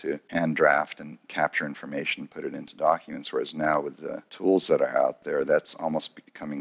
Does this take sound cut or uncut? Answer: uncut